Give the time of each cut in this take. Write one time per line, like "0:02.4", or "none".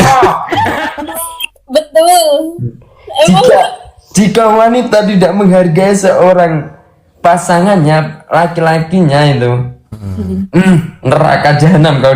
0:00.9